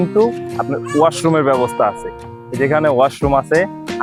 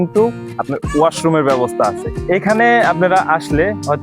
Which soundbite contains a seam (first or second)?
second